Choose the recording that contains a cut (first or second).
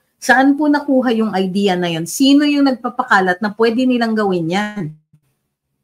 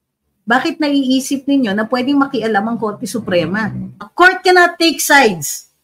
second